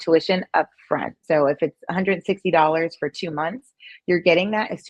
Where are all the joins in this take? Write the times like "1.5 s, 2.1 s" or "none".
1.2 s